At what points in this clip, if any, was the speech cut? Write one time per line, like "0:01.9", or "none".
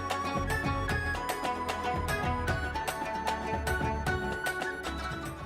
0:00.9